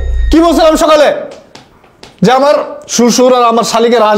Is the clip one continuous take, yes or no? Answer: yes